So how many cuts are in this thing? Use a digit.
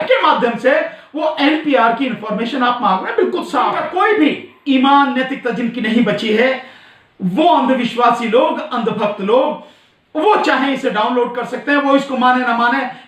1